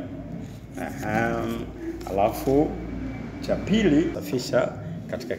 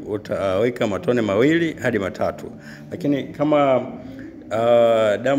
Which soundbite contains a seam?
first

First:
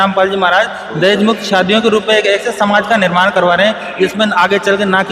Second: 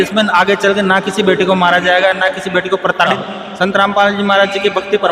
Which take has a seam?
second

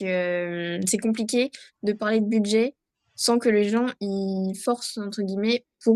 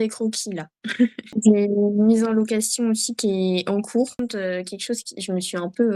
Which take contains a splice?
second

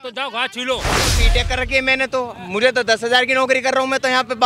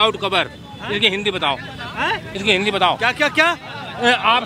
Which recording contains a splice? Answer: first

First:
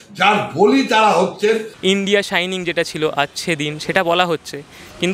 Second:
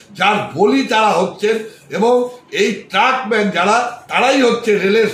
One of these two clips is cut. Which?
first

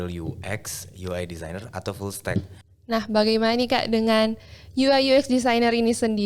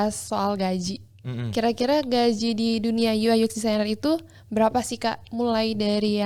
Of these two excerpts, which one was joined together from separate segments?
first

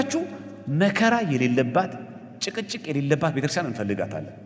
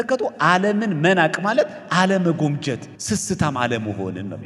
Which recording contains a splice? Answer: second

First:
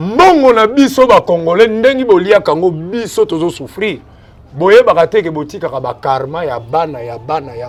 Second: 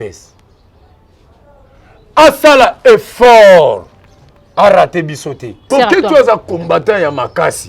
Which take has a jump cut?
second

